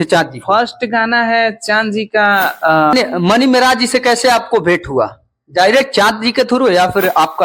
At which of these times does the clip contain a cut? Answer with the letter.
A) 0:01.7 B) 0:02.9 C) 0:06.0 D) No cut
B